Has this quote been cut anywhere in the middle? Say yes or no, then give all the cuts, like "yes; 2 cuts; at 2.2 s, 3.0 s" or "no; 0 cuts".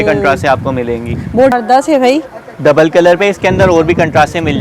yes; 1 cut; at 1.5 s